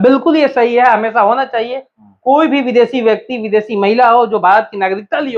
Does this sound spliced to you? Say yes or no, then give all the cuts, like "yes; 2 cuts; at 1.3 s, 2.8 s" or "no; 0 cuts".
no; 0 cuts